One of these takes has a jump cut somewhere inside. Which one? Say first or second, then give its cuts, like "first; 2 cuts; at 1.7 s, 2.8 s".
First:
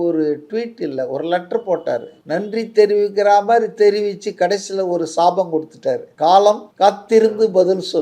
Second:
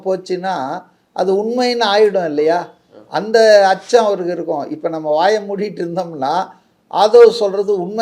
first; 3 cuts; at 2.1 s, 6.1 s, 6.7 s